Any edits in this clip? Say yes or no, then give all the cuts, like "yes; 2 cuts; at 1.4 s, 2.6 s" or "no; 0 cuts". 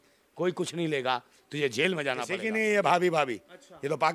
yes; 1 cut; at 2.3 s